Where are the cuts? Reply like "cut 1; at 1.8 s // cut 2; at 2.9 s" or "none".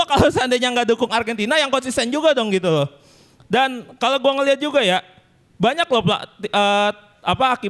none